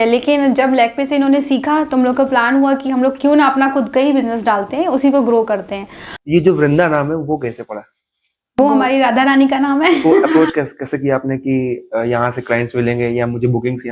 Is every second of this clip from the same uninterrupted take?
no; 2 cuts; at 6.1 s, 10.3 s

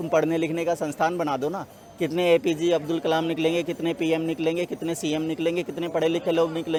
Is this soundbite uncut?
yes; 0 cuts

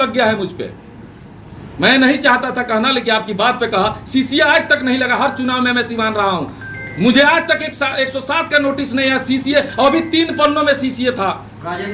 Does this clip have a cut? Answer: no; 0 cuts

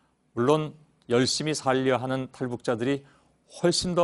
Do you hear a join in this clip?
yes; 1 cut; at 1.8 s

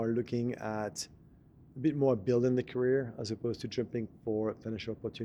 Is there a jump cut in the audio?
no; 0 cuts

